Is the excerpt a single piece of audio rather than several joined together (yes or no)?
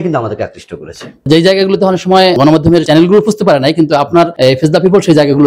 no